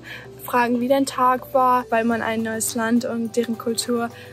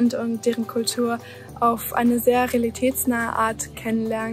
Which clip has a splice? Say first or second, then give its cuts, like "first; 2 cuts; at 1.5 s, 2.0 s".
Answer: first; 1 cut; at 1.9 s